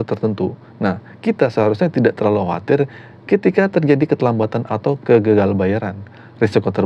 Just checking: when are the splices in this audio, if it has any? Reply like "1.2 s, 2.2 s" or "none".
none